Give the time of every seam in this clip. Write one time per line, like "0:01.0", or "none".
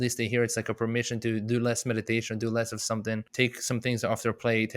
0:03.3

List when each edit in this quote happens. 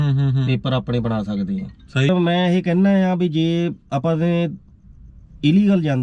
0:02.1

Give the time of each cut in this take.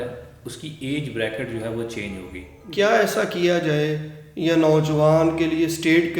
0:02.6

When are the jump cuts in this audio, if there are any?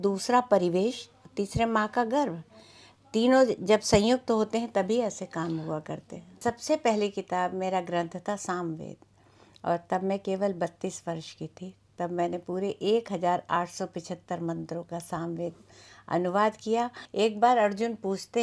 0:06.4
0:17.0

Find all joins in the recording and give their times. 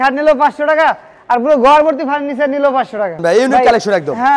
0:03.2

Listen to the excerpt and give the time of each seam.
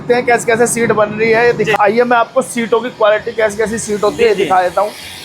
0:01.7

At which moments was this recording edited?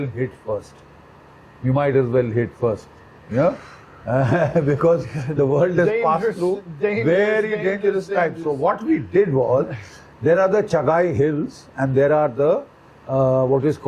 none

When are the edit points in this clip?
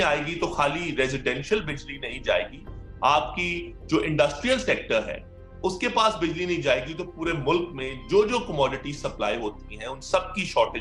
none

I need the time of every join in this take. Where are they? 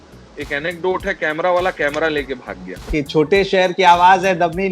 0:02.9

